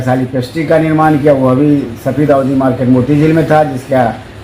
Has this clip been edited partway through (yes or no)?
no